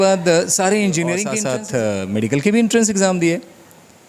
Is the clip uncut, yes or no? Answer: no